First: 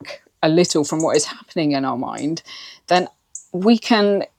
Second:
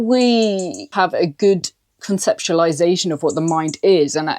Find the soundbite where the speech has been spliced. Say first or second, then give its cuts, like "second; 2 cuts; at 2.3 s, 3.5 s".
second; 1 cut; at 0.9 s